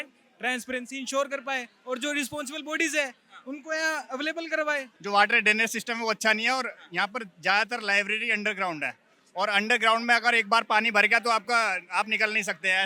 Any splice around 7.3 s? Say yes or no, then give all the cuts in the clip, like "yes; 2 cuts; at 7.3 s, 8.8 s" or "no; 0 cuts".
no; 1 cut; at 4.9 s